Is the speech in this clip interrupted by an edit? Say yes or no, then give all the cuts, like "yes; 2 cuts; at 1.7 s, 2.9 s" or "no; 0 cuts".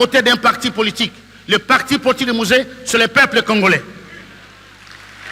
no; 0 cuts